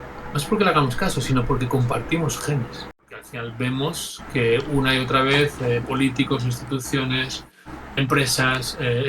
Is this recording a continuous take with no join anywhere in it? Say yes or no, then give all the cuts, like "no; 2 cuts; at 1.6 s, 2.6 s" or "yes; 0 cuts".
no; 1 cut; at 3.4 s